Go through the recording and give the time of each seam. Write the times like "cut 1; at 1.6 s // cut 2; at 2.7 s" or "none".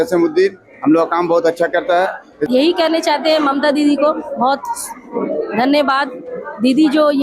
cut 1; at 2.3 s